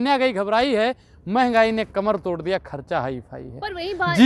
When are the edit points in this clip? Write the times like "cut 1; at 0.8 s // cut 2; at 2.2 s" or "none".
none